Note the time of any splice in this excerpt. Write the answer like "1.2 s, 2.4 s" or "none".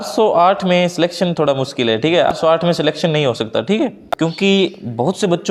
2.3 s, 3.8 s